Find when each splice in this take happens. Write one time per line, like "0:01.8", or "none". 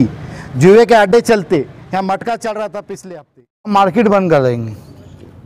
0:03.7